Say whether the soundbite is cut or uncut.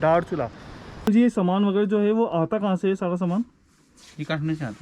cut